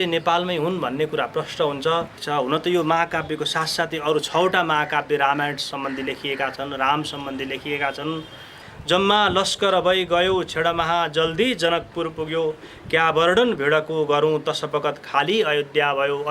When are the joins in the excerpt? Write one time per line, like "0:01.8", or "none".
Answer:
0:02.2
0:08.7